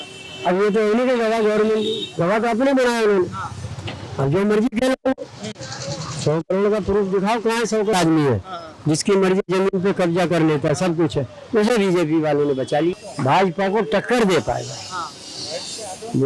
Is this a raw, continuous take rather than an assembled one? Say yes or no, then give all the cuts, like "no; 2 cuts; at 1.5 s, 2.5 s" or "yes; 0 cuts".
no; 2 cuts; at 7.9 s, 13.0 s